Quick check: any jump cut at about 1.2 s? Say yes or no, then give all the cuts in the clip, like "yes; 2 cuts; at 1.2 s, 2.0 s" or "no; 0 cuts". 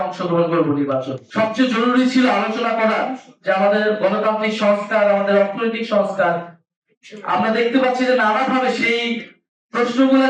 yes; 1 cut; at 1.2 s